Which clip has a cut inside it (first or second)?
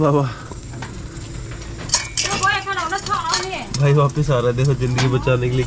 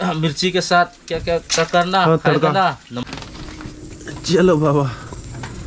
second